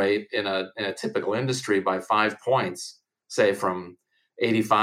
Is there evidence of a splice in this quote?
no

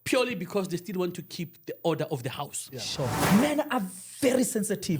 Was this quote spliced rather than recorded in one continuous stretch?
yes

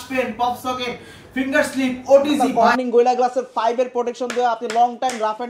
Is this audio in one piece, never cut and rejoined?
no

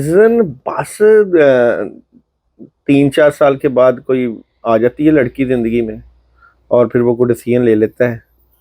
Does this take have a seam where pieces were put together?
no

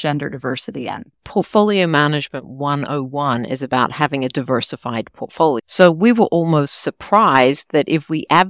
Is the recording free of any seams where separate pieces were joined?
no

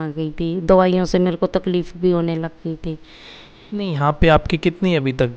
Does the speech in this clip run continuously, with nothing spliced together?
no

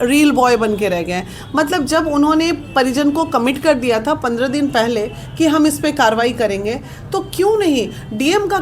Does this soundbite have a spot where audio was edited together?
no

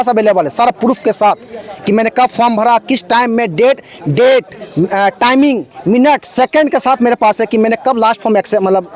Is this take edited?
no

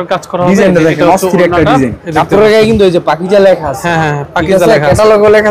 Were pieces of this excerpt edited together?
yes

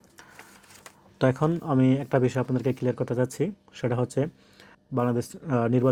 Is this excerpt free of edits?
yes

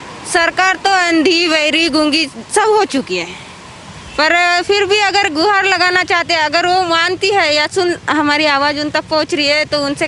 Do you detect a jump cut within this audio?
no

